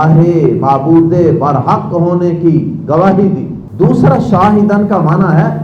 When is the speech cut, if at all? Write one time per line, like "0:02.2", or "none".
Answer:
0:03.6